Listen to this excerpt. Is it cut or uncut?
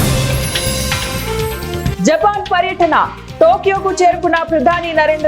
cut